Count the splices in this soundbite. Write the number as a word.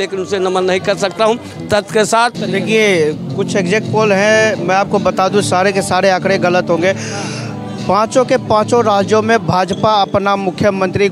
one